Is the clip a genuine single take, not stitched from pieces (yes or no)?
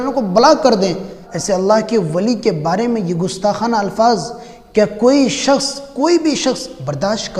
no